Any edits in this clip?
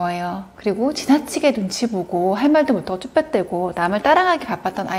no; 0 cuts

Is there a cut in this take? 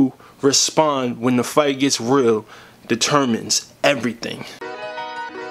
yes; 1 cut; at 4.6 s

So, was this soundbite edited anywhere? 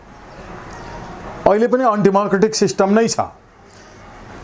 no; 0 cuts

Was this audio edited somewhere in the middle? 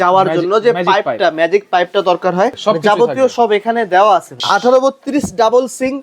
yes; 2 cuts; at 2.6 s, 4.4 s

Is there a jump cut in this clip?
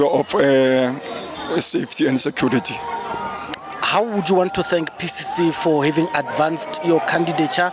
no; 0 cuts

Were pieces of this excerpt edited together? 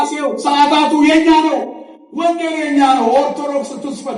no; 0 cuts

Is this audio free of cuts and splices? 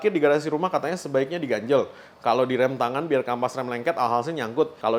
yes; 0 cuts

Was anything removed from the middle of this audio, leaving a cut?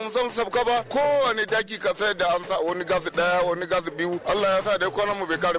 yes; 1 cut; at 4.2 s

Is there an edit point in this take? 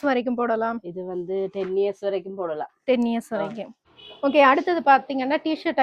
yes; 1 cut; at 4.0 s

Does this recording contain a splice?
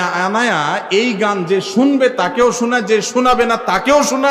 no; 0 cuts

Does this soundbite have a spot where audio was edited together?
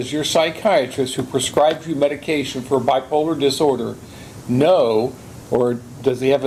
no; 0 cuts

